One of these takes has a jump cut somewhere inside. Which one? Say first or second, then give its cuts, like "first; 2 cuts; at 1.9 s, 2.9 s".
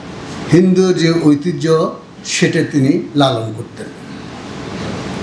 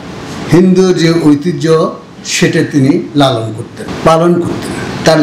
second; 1 cut; at 3.8 s